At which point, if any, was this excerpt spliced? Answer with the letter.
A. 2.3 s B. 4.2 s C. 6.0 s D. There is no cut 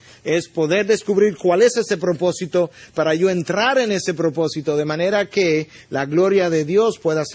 A